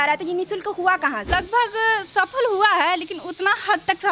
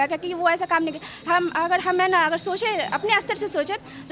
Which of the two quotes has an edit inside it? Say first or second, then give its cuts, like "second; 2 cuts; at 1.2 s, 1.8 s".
first; 1 cut; at 1.3 s